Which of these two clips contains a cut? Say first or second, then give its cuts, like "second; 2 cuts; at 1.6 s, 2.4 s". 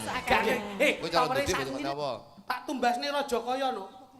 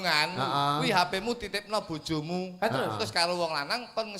first; 1 cut; at 1.5 s